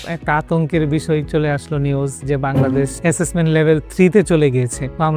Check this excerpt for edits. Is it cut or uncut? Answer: uncut